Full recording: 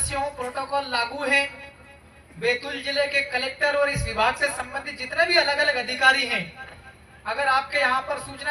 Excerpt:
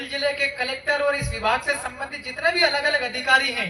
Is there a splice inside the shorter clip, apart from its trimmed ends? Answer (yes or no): no